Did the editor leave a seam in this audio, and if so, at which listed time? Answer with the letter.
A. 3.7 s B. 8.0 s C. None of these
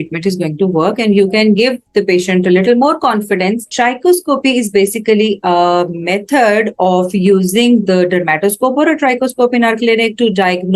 A